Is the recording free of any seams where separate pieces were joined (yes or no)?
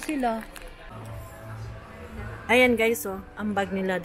no